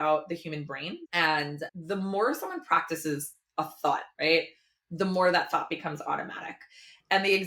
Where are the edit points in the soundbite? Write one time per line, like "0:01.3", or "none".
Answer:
none